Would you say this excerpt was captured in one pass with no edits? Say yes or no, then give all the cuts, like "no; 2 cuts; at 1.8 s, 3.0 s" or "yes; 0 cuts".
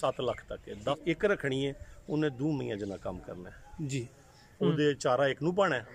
no; 1 cut; at 1.0 s